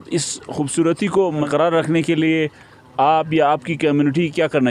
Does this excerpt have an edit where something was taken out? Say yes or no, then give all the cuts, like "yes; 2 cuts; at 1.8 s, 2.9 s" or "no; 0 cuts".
yes; 1 cut; at 1.5 s